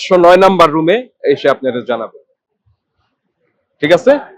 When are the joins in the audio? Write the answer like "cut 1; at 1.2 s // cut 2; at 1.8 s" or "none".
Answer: none

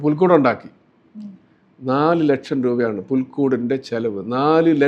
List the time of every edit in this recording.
none

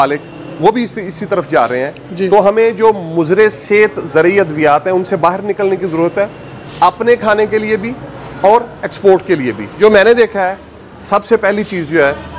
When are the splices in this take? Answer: cut 1; at 9.7 s

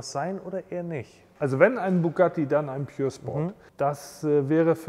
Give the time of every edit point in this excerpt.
cut 1; at 1.3 s // cut 2; at 3.6 s

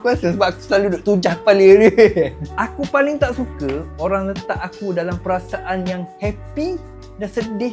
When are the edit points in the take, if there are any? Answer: cut 1; at 2.4 s

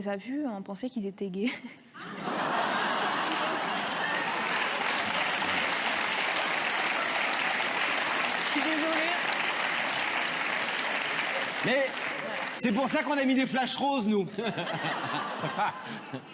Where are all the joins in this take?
cut 1; at 7.6 s

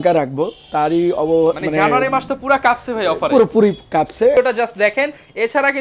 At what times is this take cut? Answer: cut 1; at 4.3 s

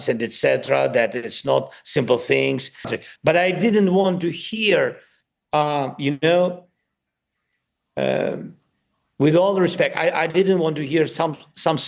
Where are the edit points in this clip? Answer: cut 1; at 2.9 s

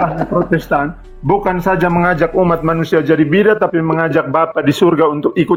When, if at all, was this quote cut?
none

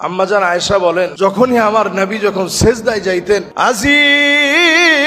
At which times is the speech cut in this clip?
cut 1; at 1.1 s // cut 2; at 3.5 s

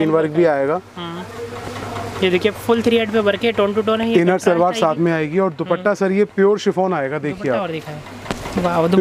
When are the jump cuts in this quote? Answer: none

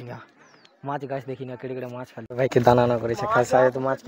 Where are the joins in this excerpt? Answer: cut 1; at 2.2 s

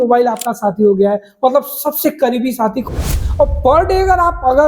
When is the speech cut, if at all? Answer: cut 1; at 2.8 s

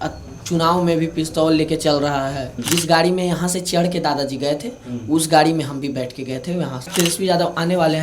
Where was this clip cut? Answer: cut 1; at 2.5 s // cut 2; at 6.9 s

